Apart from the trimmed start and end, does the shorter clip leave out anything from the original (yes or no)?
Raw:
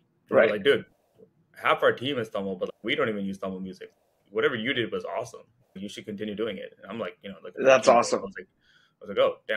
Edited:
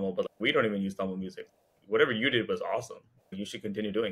no